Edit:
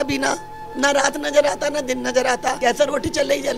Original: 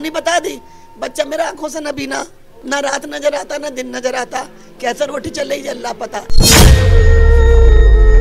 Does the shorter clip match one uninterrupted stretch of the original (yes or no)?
no